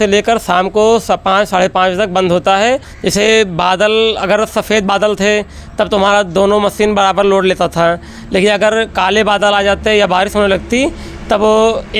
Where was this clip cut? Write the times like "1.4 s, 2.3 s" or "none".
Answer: 3.0 s